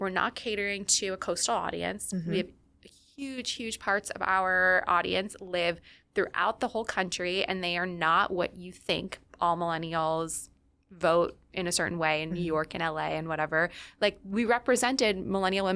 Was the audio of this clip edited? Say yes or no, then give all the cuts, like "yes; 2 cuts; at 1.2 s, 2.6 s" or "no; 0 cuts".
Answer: no; 0 cuts